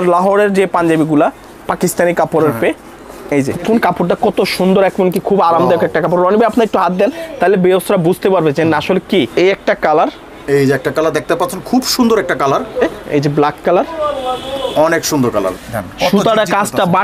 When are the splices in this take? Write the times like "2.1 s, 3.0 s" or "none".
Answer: 3.6 s, 9.3 s, 12.9 s, 15.5 s